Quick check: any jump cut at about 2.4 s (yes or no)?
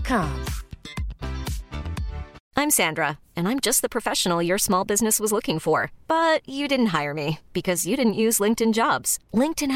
yes